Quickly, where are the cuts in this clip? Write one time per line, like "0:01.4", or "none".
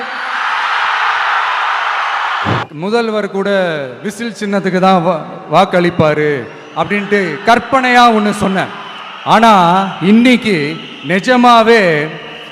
0:02.6